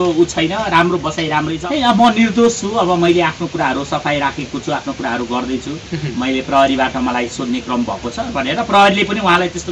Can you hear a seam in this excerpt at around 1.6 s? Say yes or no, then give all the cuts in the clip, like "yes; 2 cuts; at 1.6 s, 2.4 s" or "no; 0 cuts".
yes; 1 cut; at 1.6 s